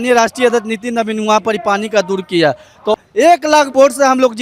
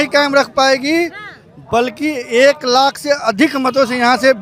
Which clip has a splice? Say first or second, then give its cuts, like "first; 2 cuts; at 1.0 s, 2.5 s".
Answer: first; 1 cut; at 2.9 s